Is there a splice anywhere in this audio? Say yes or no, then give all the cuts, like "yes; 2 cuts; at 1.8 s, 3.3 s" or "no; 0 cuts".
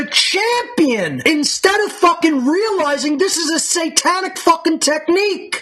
no; 0 cuts